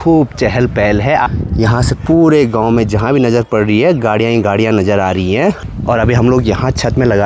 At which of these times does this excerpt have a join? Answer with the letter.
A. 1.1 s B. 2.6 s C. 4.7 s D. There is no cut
D